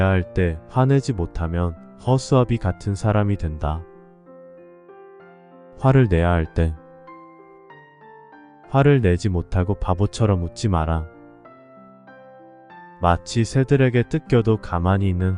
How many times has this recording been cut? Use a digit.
2